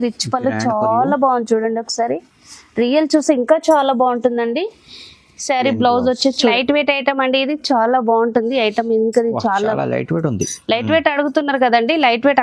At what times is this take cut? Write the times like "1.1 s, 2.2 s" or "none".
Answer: 6.5 s